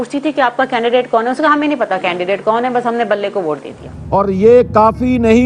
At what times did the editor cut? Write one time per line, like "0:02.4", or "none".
0:04.0